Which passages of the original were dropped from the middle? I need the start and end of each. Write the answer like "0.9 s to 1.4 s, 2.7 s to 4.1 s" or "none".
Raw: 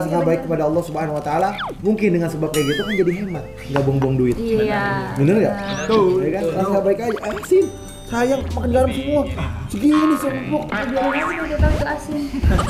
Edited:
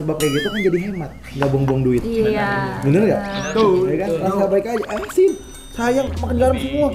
none

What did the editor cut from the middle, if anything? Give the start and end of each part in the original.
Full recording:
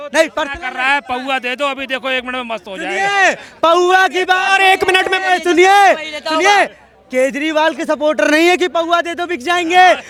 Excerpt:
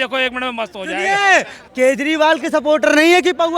3.5 s to 6.9 s

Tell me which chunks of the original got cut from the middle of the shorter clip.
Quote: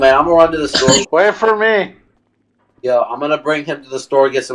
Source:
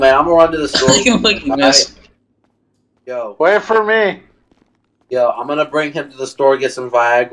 1.0 s to 3.3 s

